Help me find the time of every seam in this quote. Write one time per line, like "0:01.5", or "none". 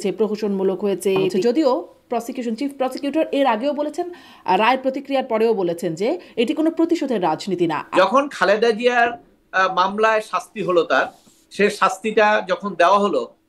0:01.4
0:07.8

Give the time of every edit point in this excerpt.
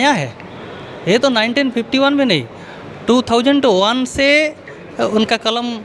none

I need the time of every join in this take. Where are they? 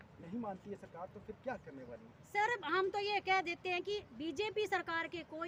none

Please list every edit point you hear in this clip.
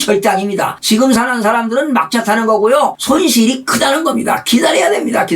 none

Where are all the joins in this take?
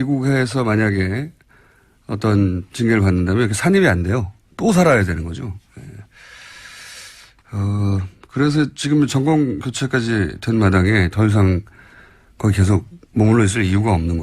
0:08.1

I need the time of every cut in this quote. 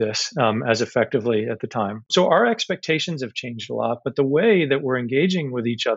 0:02.0

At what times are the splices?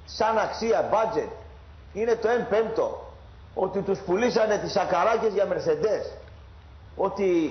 0:02.0

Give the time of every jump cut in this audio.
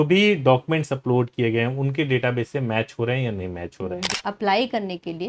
0:04.1

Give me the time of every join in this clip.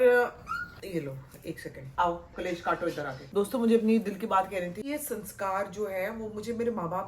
0:02.3
0:03.2
0:04.9

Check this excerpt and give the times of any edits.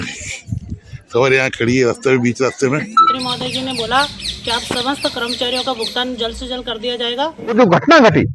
0:03.1
0:07.5

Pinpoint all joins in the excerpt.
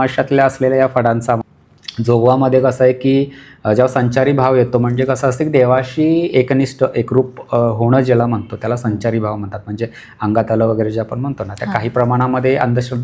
0:01.4

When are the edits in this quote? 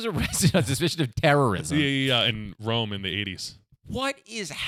0:02.3

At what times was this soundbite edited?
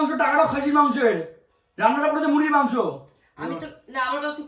none

